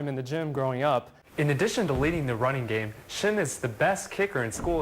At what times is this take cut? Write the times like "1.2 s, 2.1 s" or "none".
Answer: 1.2 s